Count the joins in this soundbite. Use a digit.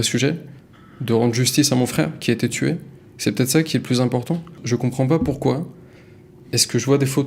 1